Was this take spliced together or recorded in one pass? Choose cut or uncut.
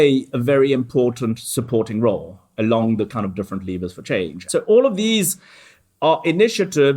cut